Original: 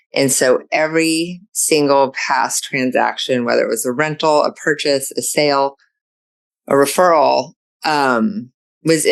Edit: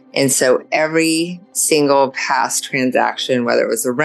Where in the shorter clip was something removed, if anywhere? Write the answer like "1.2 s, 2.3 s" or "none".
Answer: none